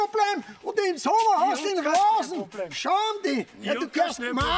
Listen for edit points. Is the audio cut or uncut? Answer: uncut